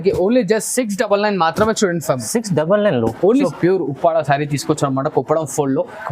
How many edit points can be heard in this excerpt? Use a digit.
1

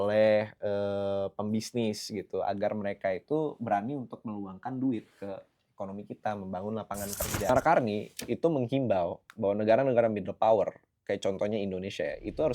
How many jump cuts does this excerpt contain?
1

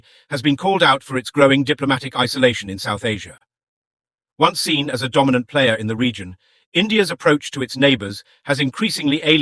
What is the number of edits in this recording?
0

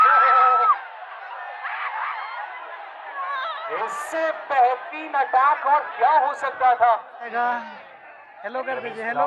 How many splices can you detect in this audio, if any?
1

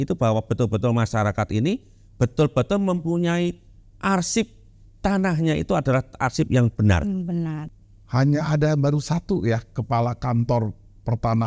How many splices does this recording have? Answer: 1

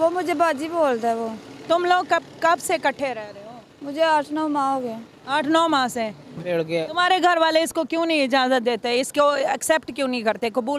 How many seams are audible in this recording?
1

